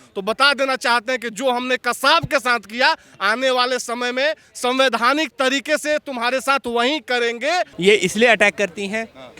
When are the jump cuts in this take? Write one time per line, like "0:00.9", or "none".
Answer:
0:07.7